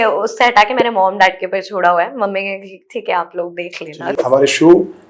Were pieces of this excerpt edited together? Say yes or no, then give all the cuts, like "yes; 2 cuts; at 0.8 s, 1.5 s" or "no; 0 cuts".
yes; 1 cut; at 4.1 s